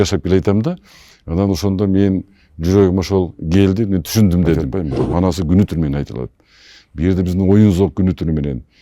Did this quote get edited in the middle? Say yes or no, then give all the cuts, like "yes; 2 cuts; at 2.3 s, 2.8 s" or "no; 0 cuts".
yes; 1 cut; at 4.6 s